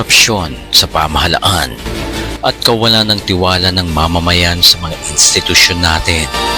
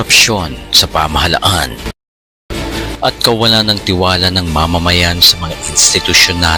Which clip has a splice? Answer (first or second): first